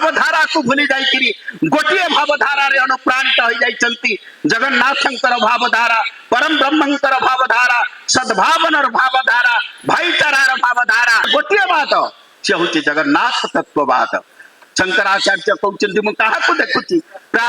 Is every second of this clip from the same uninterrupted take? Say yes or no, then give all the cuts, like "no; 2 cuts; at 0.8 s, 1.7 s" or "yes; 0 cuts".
no; 1 cut; at 11.3 s